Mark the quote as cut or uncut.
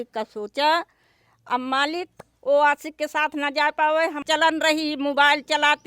cut